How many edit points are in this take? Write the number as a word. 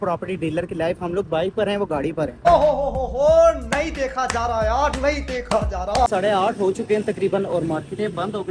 zero